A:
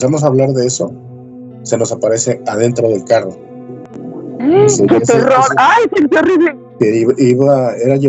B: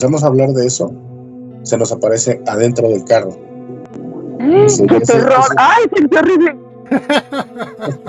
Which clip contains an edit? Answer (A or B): A